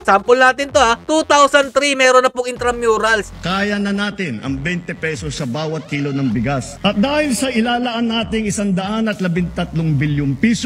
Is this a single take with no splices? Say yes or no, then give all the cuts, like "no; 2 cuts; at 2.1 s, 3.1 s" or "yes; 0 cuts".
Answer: no; 2 cuts; at 3.3 s, 6.7 s